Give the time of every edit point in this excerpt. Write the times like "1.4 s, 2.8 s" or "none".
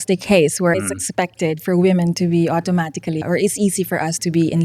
0.7 s, 3.2 s